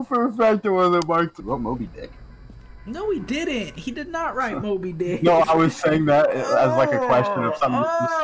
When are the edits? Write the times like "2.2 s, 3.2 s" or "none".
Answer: 1.4 s